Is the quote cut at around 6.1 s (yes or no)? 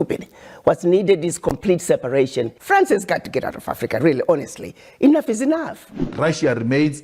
yes